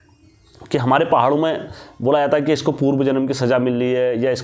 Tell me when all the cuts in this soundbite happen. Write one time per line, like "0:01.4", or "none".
none